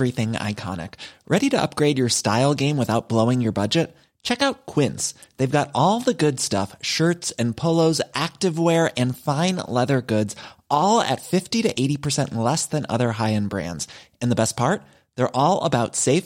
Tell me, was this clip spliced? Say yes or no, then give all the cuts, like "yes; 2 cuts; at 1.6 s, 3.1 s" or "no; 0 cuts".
no; 0 cuts